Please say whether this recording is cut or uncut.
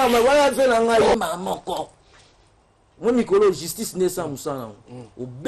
cut